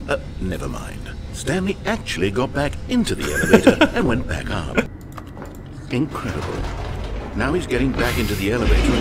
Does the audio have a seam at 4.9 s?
yes; 1 cut; at 4.9 s

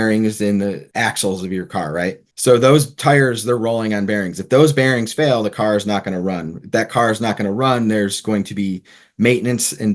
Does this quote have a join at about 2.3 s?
yes; 1 cut; at 2.3 s

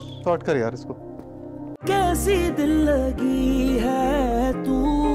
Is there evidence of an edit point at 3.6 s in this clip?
no; 1 cut; at 1.7 s

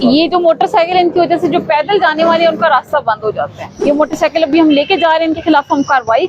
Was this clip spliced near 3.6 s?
yes; 1 cut; at 3.6 s

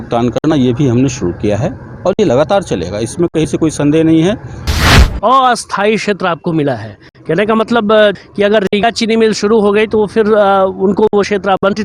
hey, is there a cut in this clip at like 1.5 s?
no; 1 cut; at 4.9 s

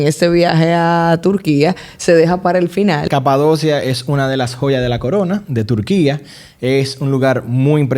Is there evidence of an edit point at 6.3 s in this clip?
no; 1 cut; at 3.1 s

